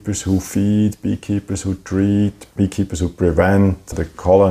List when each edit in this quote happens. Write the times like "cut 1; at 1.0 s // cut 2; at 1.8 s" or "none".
cut 1; at 2.4 s

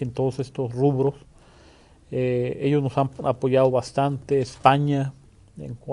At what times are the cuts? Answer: cut 1; at 4.8 s

